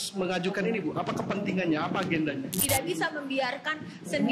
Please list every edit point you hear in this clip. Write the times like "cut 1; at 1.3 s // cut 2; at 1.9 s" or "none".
cut 1; at 2.6 s